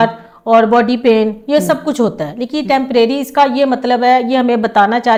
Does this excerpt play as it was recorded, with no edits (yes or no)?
yes